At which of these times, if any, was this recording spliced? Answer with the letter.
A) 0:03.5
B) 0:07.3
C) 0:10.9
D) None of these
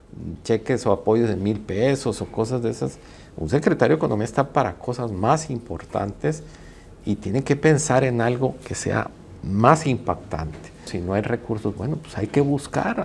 C